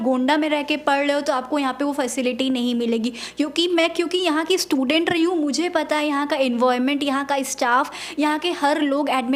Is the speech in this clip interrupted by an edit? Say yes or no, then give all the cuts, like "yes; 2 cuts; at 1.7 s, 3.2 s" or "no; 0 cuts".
no; 0 cuts